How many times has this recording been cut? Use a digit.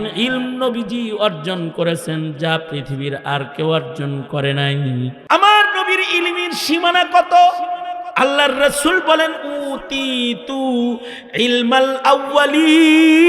1